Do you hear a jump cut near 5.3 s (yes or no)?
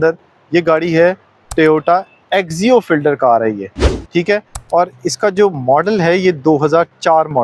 no